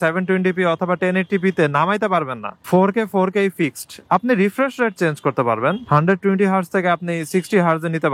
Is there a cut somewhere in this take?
no; 0 cuts

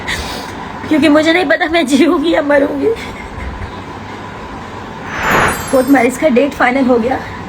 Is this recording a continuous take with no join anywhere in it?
no; 1 cut; at 5.5 s

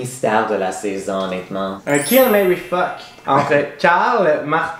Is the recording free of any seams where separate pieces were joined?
no; 2 cuts; at 1.8 s, 3.1 s

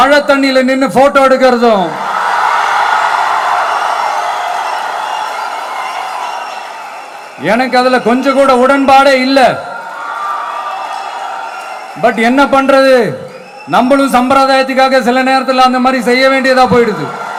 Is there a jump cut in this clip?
no; 0 cuts

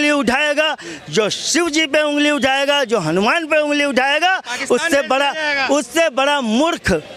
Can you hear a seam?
no; 0 cuts

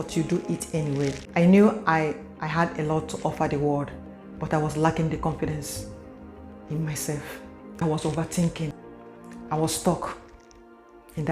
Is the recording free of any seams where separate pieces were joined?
no; 3 cuts; at 1.2 s, 7.8 s, 8.8 s

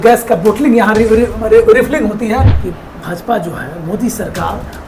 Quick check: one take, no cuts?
no; 1 cut; at 2.5 s

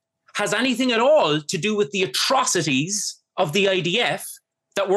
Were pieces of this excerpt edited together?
no; 0 cuts

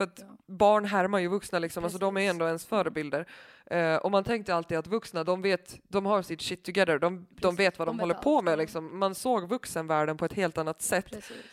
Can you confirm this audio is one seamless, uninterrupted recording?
yes; 0 cuts

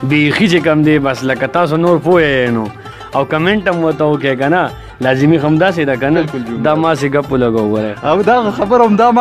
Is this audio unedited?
yes; 0 cuts

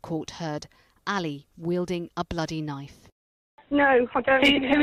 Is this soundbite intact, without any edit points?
yes; 0 cuts

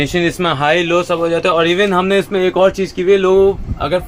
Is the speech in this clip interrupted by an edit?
no; 0 cuts

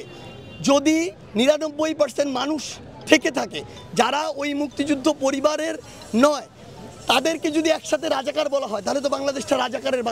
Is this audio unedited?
yes; 0 cuts

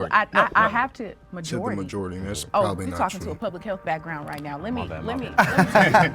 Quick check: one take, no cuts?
yes; 0 cuts

